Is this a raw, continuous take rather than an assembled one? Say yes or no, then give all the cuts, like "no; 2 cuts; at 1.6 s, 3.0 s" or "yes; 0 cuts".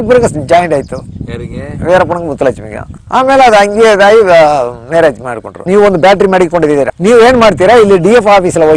no; 2 cuts; at 5.6 s, 6.9 s